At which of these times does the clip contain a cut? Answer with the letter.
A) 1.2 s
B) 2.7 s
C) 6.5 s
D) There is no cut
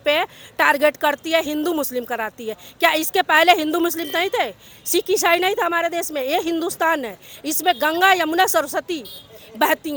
D